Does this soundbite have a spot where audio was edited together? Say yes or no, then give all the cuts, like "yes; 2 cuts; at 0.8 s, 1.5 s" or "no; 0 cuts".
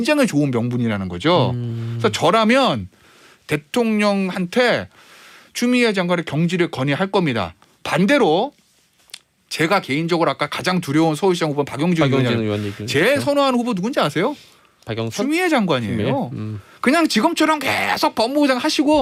no; 0 cuts